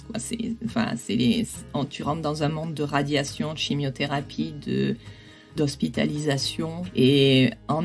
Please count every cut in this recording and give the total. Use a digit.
2